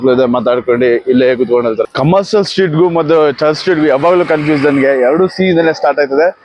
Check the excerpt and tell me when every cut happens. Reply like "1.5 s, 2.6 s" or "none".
1.9 s